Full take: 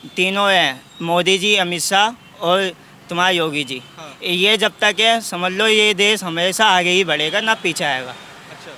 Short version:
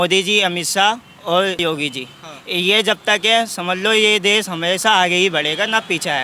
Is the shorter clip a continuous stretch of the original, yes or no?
no